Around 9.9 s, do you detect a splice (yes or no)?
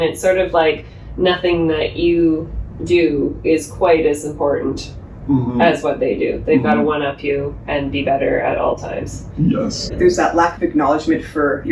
yes